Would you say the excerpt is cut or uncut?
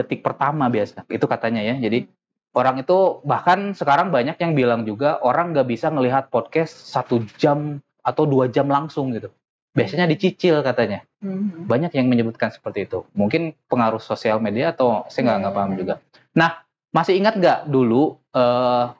uncut